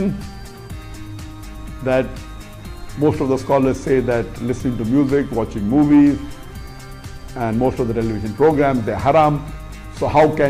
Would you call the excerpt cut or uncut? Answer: uncut